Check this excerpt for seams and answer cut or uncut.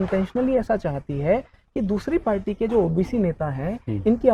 uncut